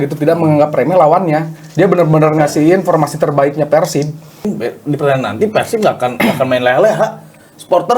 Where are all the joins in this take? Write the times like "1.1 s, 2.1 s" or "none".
4.4 s